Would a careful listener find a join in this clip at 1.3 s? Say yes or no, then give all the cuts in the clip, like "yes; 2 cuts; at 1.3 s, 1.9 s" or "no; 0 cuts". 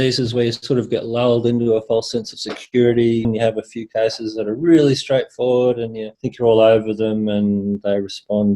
no; 1 cut; at 3.3 s